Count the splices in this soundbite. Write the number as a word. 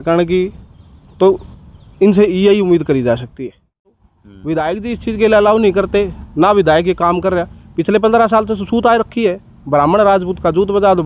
one